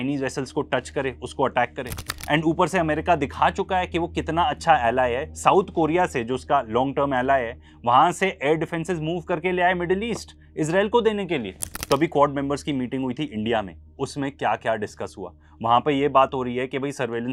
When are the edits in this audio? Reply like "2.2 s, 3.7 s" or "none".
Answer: none